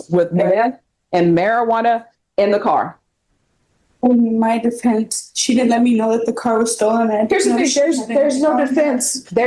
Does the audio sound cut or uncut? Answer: uncut